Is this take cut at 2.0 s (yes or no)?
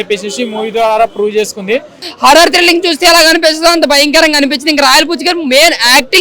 yes